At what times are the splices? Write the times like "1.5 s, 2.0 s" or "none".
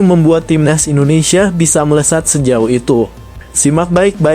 none